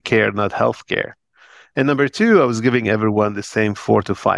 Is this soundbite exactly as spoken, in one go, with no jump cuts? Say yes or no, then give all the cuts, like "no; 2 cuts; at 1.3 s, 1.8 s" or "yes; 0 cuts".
yes; 0 cuts